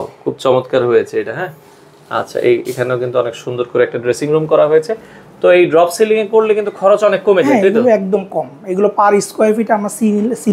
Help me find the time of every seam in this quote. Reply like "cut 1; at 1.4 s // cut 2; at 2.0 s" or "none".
none